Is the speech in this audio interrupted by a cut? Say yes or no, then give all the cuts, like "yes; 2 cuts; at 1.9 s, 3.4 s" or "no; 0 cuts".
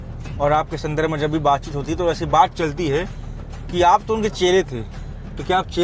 no; 0 cuts